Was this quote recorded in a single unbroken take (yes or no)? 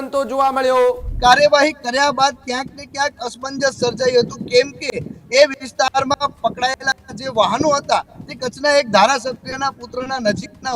no